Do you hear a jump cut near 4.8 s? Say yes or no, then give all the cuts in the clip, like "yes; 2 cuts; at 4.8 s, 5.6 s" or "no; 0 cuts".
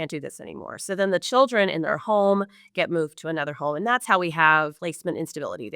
yes; 1 cut; at 4.8 s